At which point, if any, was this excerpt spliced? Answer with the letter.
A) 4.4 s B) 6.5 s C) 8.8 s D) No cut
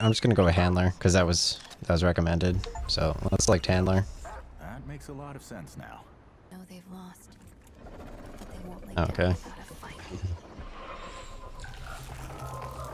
B